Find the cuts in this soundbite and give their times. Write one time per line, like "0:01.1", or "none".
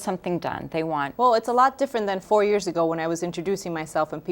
0:01.0
0:02.2